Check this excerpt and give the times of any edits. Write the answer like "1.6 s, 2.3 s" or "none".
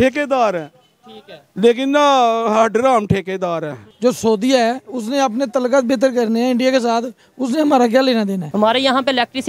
3.8 s, 8.5 s